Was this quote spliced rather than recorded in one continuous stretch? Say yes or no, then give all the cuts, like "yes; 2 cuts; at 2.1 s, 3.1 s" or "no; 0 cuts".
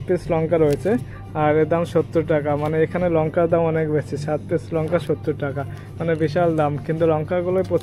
no; 0 cuts